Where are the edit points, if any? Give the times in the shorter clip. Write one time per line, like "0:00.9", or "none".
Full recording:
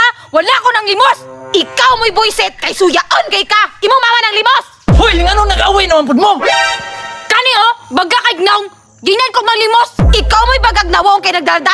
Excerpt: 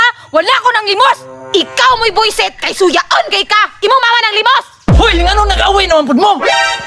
none